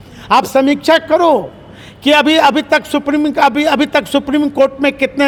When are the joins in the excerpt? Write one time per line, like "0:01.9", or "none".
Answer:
none